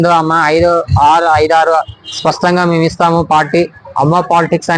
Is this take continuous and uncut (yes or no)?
yes